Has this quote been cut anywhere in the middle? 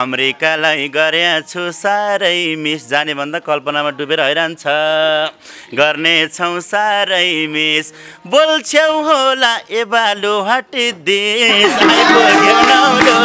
no; 0 cuts

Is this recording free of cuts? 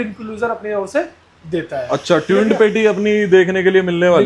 yes; 0 cuts

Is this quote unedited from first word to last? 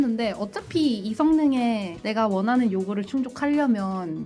yes; 0 cuts

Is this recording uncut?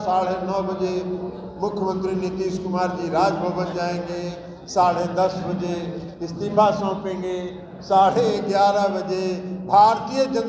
yes; 0 cuts

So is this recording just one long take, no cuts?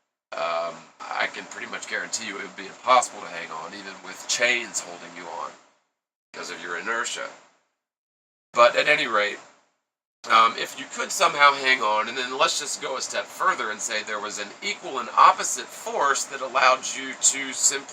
no; 1 cut; at 11.4 s

